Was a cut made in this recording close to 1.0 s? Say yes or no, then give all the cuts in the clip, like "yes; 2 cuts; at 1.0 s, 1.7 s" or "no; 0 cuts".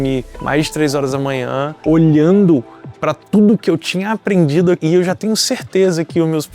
no; 1 cut; at 4.8 s